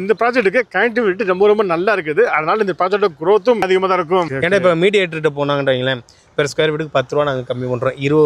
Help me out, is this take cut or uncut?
cut